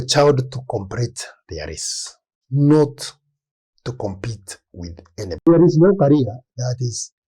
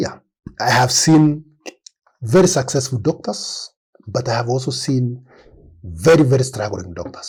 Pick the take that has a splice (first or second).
first